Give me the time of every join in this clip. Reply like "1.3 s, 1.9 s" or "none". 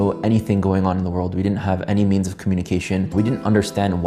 3.1 s